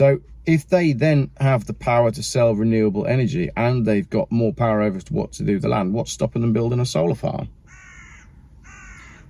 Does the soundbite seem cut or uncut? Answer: uncut